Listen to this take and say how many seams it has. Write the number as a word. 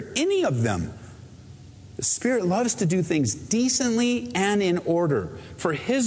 zero